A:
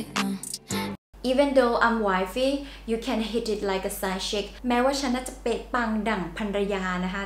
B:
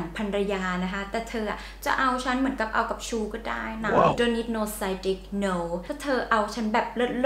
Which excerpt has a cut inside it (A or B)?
B